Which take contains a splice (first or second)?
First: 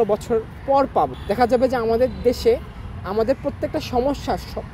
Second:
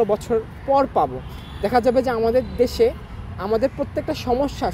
first